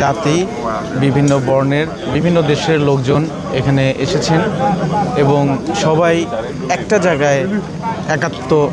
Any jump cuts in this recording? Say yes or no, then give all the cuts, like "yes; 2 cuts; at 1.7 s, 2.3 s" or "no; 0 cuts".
no; 0 cuts